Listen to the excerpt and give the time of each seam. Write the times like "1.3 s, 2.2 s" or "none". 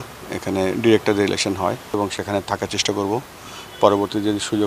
2.0 s